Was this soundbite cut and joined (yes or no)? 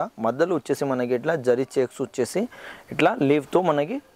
no